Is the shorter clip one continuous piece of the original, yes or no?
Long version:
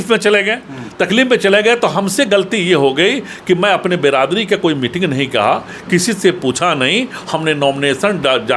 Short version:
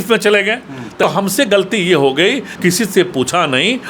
no